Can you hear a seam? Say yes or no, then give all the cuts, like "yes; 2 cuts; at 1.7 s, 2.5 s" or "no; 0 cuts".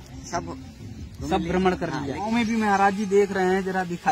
yes; 1 cut; at 2.3 s